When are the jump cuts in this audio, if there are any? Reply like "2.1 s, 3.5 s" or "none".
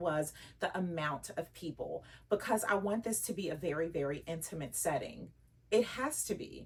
none